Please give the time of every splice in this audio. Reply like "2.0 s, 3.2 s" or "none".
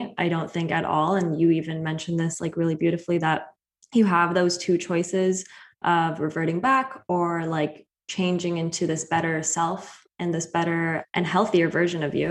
11.0 s

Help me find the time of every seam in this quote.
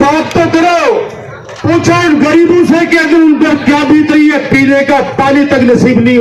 none

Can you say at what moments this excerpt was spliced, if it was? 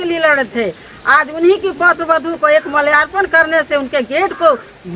none

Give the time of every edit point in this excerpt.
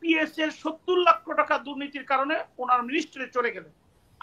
none

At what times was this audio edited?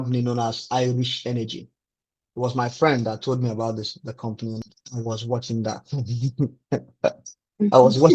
4.6 s

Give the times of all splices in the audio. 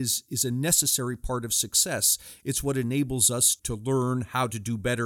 3.6 s

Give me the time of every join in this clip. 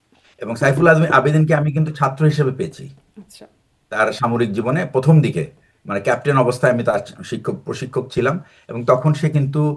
none

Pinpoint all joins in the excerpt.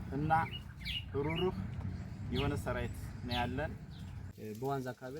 4.2 s

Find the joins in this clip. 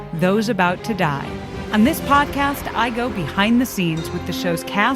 1.6 s

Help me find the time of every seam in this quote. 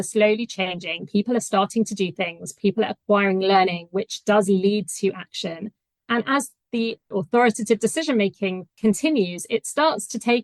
7.0 s

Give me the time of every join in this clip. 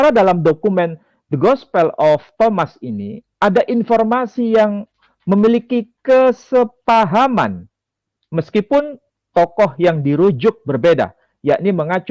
none

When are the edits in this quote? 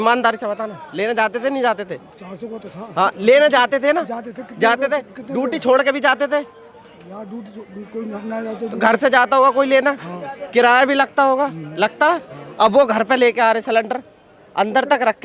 none

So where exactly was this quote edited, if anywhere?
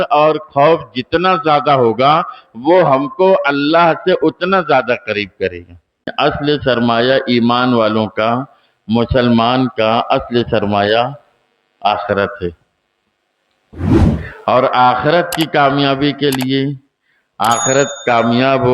6.1 s

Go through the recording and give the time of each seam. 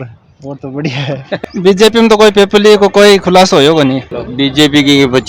1.4 s, 4.1 s

